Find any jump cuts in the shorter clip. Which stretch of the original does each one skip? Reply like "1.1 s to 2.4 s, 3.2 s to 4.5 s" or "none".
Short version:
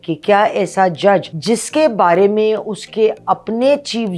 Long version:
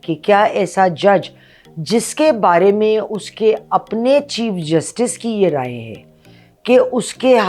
1.3 s to 1.8 s